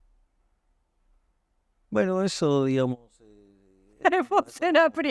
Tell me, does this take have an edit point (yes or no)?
no